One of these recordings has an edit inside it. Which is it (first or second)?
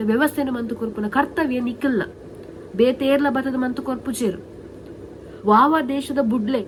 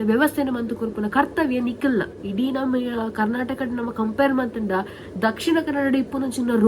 second